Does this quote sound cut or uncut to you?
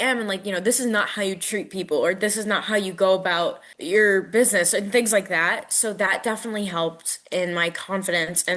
cut